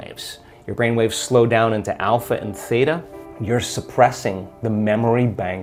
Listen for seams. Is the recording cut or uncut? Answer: uncut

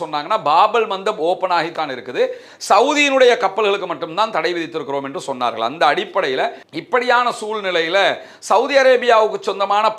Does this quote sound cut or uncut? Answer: cut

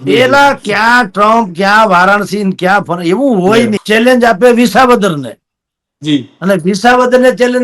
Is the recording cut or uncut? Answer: cut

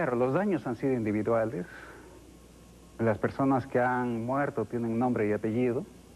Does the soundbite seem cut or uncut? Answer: uncut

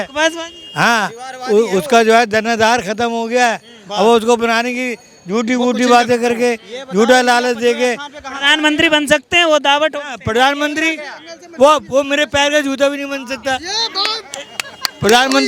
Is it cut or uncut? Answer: uncut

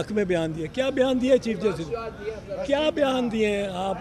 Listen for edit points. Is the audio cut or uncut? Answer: uncut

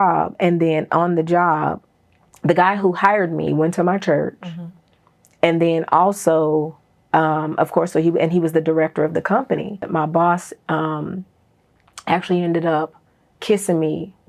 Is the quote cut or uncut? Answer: cut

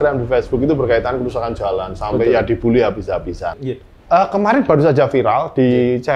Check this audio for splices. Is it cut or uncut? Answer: cut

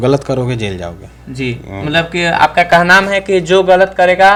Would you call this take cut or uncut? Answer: uncut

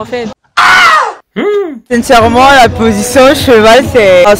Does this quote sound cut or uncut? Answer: cut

